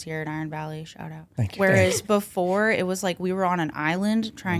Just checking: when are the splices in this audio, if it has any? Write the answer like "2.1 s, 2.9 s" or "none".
1.2 s